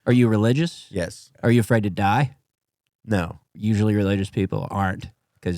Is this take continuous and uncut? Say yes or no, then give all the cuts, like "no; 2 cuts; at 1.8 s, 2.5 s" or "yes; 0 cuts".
no; 2 cuts; at 1.2 s, 3.4 s